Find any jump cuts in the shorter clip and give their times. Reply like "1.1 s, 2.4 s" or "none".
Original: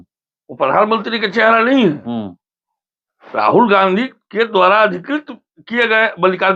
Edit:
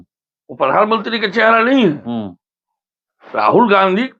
none